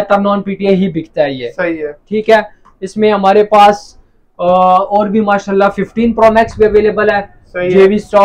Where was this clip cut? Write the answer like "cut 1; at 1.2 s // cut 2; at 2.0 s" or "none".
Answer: none